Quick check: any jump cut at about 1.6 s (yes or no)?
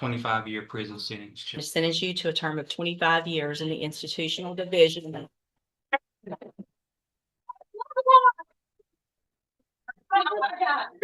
yes